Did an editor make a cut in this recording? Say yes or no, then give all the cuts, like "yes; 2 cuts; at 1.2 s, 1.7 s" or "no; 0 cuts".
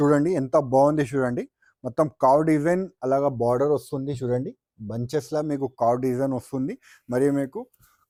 no; 0 cuts